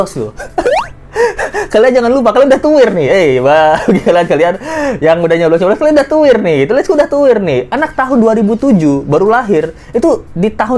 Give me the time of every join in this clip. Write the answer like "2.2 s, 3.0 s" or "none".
none